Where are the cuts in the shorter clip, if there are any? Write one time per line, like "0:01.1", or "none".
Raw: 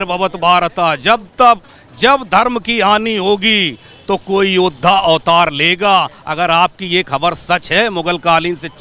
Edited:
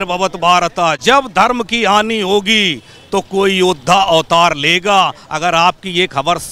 0:01.0